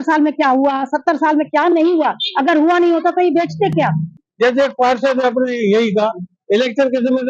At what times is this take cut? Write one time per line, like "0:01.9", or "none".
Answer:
0:04.1